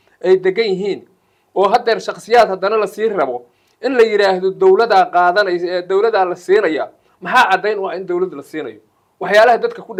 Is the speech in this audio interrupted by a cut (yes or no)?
no